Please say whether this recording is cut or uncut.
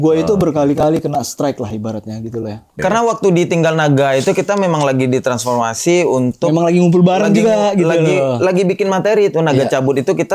cut